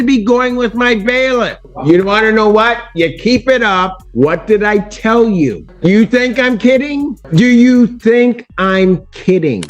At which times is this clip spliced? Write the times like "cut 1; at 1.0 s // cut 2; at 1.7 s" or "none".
cut 1; at 1.7 s // cut 2; at 4.0 s // cut 3; at 5.7 s // cut 4; at 7.2 s